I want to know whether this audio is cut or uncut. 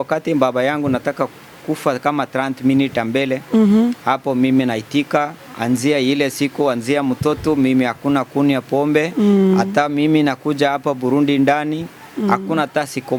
uncut